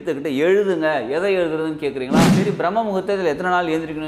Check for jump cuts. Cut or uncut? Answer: cut